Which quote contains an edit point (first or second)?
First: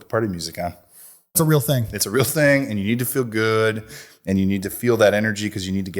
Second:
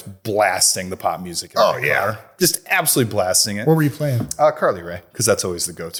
first